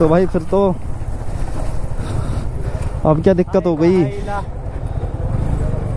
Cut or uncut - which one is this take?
uncut